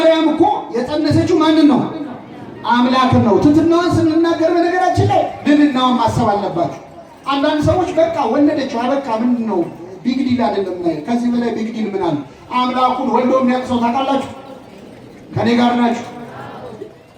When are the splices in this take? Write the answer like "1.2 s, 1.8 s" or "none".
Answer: none